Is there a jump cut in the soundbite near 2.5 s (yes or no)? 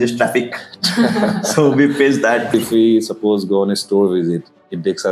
yes